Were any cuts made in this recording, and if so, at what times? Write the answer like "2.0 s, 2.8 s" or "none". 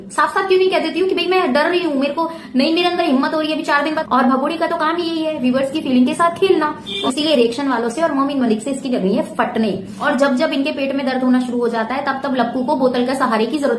4.0 s, 6.9 s, 9.9 s